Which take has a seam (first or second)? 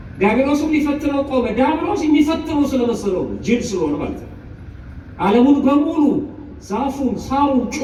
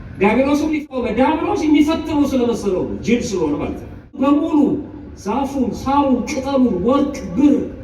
second